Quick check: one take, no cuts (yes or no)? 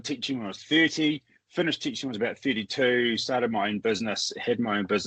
yes